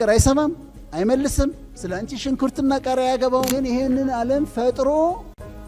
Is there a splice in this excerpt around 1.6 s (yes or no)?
no